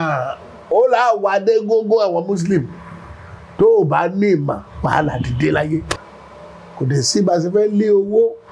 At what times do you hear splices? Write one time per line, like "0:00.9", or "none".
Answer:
0:06.0